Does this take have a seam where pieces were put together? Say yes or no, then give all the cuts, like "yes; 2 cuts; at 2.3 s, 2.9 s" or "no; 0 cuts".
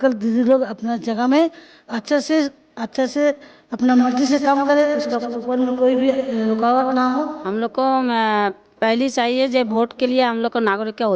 yes; 1 cut; at 7.3 s